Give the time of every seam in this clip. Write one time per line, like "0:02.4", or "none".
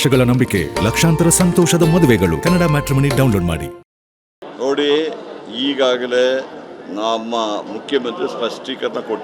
0:04.5